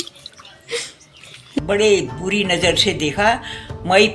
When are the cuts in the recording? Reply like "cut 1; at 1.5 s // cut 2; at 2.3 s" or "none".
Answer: cut 1; at 1.4 s